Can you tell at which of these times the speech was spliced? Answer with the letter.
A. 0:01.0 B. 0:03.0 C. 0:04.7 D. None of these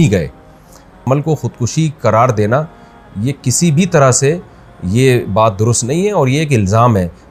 A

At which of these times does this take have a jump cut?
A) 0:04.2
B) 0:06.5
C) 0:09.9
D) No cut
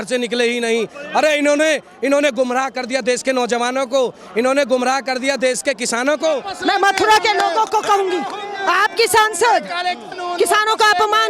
B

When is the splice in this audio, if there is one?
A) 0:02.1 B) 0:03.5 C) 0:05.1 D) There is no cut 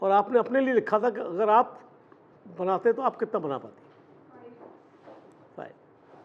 D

